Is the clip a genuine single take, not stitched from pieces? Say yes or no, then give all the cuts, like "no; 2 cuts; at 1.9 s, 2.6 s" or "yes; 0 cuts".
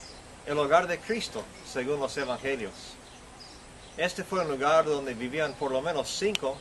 yes; 0 cuts